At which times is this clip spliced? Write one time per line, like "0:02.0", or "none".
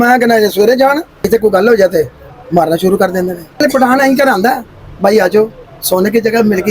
0:01.3